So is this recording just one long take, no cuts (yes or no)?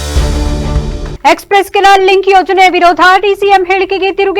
no